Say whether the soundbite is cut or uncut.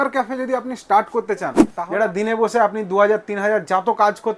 cut